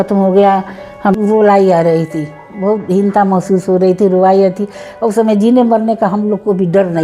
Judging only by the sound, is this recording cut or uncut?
cut